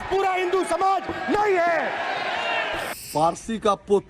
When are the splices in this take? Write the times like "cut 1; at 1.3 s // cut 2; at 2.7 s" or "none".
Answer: cut 1; at 2.9 s